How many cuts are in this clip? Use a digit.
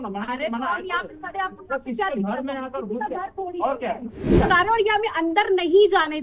1